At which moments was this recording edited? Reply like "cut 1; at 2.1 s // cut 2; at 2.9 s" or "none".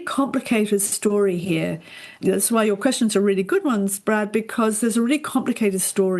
cut 1; at 2.2 s